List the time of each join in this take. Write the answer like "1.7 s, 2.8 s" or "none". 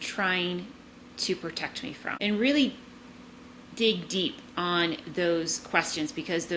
2.2 s